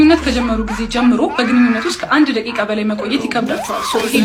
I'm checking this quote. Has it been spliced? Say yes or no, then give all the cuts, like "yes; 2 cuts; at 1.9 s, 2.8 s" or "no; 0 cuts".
no; 0 cuts